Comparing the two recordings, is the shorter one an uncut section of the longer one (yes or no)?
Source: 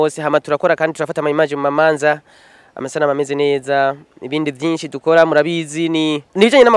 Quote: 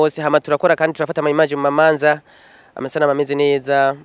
yes